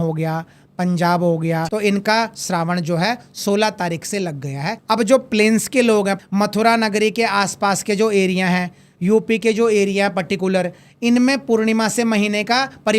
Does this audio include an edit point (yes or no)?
yes